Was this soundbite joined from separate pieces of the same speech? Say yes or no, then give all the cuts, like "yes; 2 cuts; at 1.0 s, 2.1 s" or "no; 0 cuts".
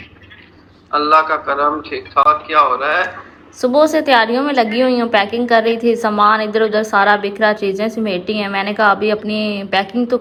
no; 0 cuts